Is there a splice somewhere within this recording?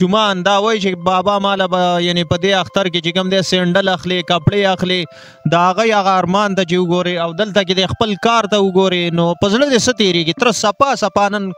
no; 0 cuts

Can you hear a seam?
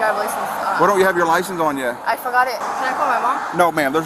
yes; 1 cut; at 2.6 s

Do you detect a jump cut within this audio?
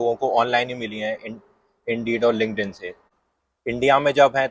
yes; 1 cut; at 3.0 s

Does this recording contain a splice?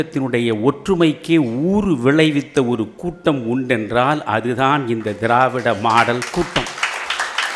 no; 0 cuts

